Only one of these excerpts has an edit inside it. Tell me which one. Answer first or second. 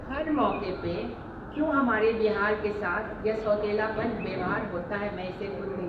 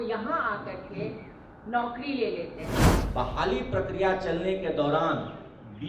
second